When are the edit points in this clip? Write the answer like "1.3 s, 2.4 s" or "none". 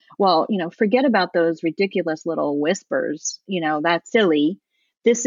4.0 s